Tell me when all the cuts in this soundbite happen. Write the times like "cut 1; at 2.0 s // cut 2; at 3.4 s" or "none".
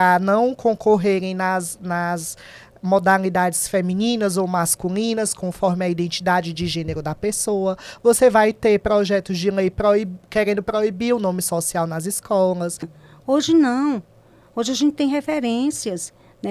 cut 1; at 12.9 s